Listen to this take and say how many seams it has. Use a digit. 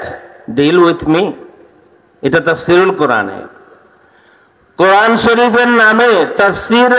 0